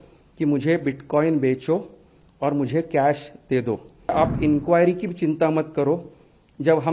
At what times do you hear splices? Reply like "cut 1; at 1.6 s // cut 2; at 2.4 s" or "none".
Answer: cut 1; at 4.1 s